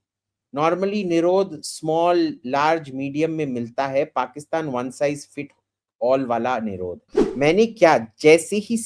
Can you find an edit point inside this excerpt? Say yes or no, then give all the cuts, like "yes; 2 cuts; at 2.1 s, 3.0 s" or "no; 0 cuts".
yes; 1 cut; at 7.2 s